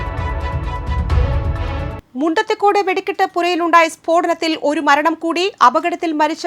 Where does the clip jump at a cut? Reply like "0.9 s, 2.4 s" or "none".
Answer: 2.0 s